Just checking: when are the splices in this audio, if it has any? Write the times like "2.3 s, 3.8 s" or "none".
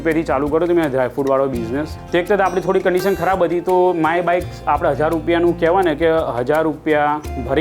1.9 s